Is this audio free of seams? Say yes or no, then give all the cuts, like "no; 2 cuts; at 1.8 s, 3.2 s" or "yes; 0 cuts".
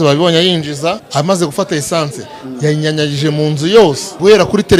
no; 2 cuts; at 1.0 s, 3.8 s